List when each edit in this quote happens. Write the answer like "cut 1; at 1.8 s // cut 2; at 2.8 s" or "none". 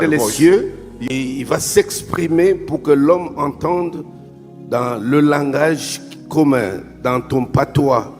cut 1; at 0.9 s